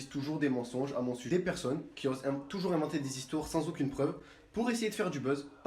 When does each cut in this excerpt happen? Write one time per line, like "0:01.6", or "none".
0:01.3
0:04.2